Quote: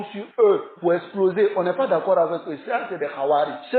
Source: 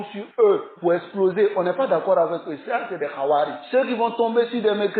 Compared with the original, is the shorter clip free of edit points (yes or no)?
yes